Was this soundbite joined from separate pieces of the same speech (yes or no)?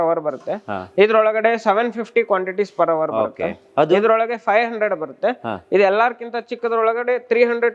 no